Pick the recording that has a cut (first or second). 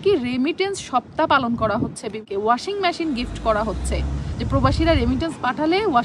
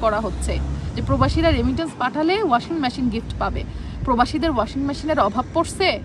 first